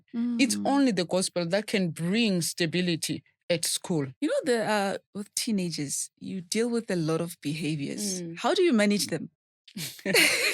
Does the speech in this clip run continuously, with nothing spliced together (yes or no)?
no